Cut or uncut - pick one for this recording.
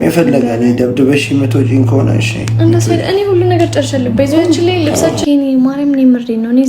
cut